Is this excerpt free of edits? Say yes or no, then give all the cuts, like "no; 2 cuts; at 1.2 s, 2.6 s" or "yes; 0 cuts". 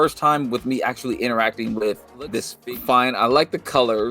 no; 1 cut; at 2.5 s